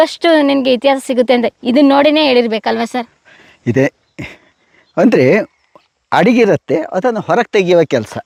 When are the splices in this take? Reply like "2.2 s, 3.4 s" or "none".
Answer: none